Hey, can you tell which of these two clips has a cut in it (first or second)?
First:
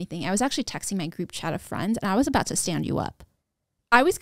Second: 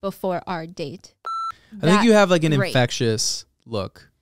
second